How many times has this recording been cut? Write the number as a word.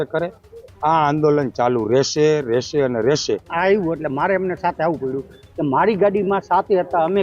one